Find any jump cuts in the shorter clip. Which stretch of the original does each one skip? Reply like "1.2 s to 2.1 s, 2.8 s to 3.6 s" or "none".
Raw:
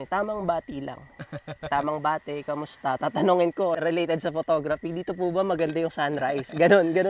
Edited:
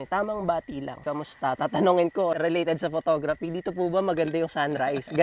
1.0 s to 2.4 s

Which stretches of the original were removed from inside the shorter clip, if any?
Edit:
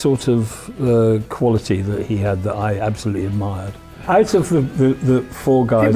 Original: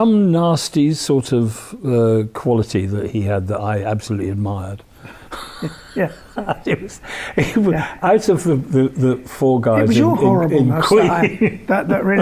5.0 s to 7.9 s

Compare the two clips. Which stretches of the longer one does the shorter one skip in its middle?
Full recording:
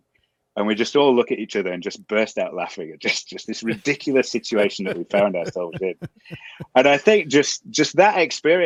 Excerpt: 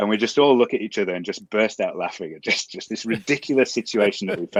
none

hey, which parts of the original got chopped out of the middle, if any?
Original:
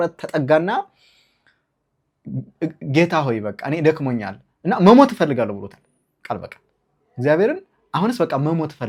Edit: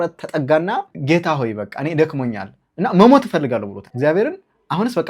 0.9 s to 2.8 s, 5.7 s to 7.0 s

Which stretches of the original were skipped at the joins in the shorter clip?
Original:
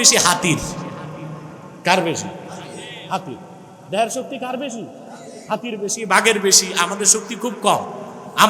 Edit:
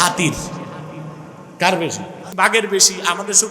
2.5 s to 6.0 s

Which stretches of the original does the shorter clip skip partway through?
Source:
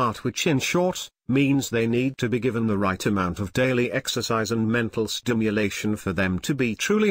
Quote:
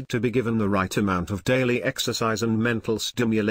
none

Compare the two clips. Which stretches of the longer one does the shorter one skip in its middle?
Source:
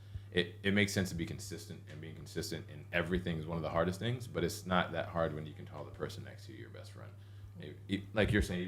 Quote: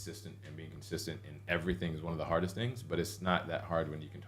none

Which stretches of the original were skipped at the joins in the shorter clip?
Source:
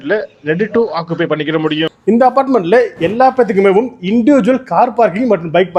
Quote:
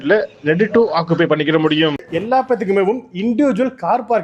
2.0 s to 2.9 s

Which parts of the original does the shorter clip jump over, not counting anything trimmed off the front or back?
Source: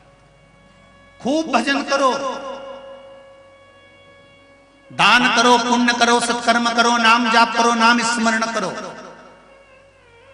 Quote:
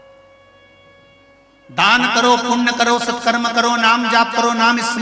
none

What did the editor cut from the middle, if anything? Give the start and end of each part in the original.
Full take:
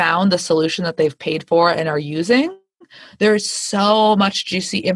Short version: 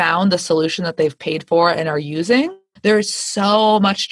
2.6 s to 3.0 s

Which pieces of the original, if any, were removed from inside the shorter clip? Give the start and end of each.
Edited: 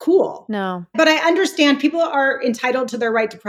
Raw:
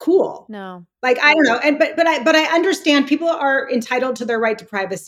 0.9 s to 2.2 s

